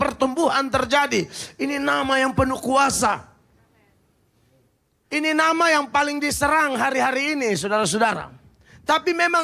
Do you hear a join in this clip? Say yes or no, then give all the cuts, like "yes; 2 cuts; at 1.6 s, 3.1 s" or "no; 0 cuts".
no; 0 cuts